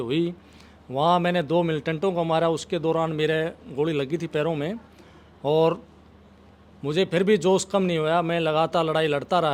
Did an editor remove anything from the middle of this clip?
no; 0 cuts

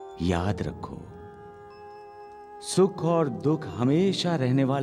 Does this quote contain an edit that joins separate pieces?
no; 0 cuts

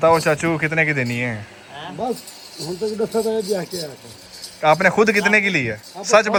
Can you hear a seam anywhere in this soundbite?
no; 0 cuts

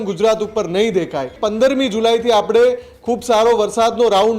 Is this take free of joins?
no; 1 cut; at 1.3 s

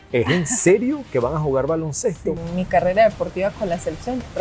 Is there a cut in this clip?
yes; 1 cut; at 2.4 s

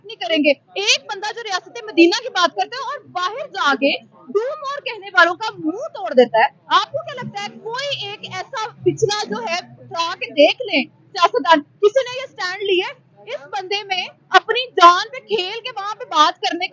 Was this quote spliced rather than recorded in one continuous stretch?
no; 0 cuts

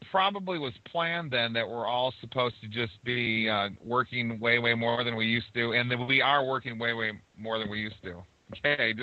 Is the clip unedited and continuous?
yes; 0 cuts

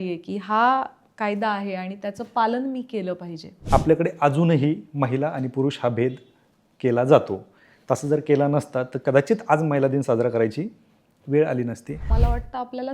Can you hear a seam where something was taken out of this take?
yes; 2 cuts; at 3.6 s, 12.1 s

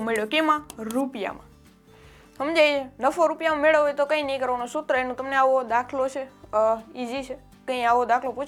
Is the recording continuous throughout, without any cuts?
yes; 0 cuts

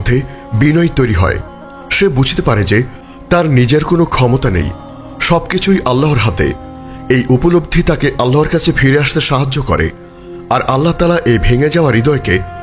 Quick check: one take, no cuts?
yes; 0 cuts

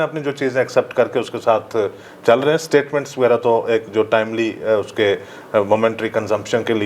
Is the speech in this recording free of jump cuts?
yes; 0 cuts

